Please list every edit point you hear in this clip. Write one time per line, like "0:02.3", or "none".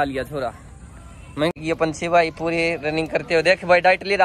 0:01.5